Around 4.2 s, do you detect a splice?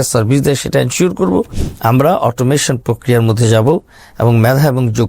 no; 1 cut; at 1.6 s

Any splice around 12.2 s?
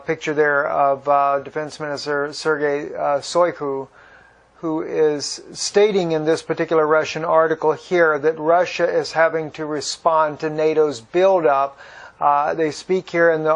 no; 1 cut; at 7.1 s

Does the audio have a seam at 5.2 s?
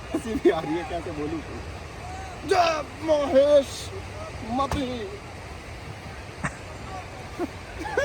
no; 0 cuts

